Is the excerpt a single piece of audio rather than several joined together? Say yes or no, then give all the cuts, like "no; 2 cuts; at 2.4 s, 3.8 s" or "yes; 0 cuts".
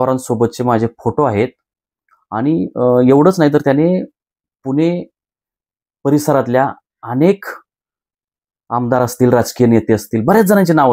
yes; 0 cuts